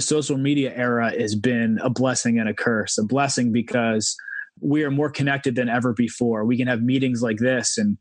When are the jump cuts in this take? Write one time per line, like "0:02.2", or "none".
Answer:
none